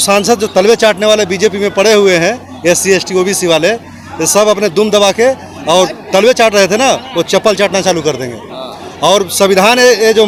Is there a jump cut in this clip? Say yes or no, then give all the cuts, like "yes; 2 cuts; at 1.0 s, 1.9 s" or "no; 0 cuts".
no; 0 cuts